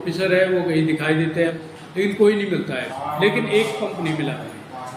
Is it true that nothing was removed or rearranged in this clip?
no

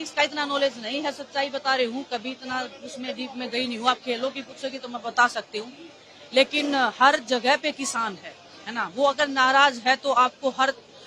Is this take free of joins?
yes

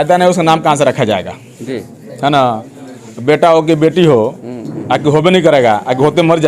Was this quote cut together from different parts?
no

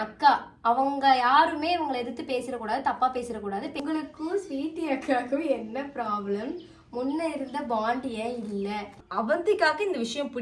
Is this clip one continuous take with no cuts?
no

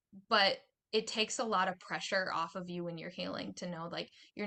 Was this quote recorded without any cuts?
yes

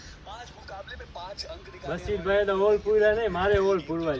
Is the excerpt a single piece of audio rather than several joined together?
yes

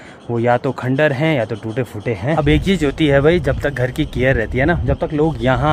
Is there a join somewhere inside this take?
no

